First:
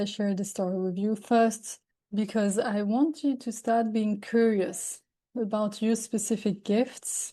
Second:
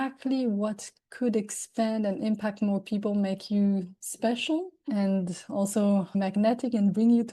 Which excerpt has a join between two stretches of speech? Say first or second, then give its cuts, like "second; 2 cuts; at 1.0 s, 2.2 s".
second; 1 cut; at 6.2 s